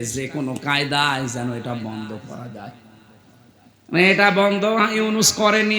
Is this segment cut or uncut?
uncut